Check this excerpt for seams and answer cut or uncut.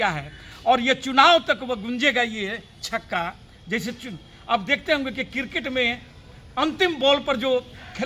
uncut